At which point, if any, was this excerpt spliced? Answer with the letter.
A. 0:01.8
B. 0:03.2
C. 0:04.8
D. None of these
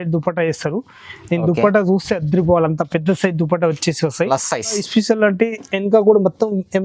C